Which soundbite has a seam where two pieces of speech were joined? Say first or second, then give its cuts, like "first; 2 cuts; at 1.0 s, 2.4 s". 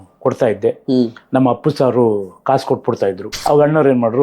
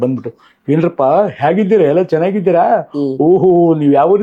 first; 1 cut; at 3.3 s